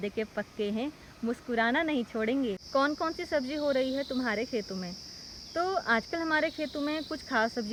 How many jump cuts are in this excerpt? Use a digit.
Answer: 0